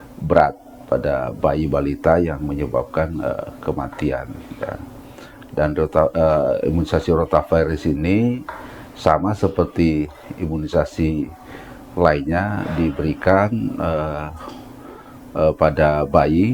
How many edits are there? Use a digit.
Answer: 0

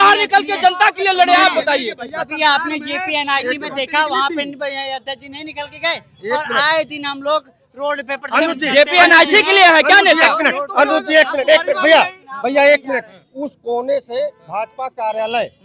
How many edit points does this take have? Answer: 0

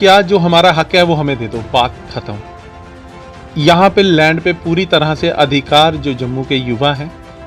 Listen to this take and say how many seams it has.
0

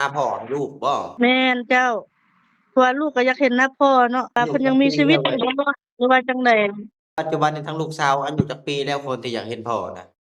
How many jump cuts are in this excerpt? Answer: 3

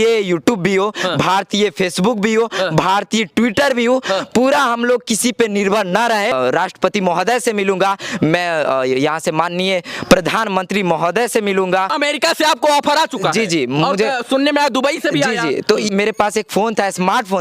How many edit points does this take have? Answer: 3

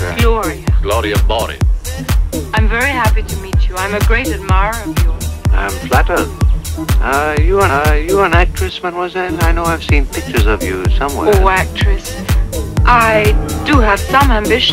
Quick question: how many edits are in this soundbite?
1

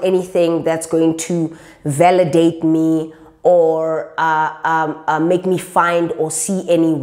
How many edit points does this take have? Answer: 0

